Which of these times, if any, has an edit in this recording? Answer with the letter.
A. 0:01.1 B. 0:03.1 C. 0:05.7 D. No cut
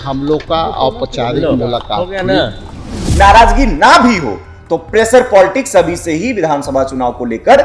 B